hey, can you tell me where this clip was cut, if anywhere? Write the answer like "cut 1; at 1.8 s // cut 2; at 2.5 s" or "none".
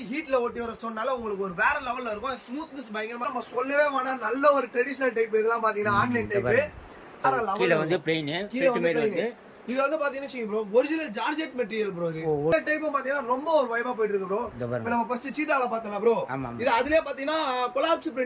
cut 1; at 3.2 s // cut 2; at 7.2 s // cut 3; at 12.5 s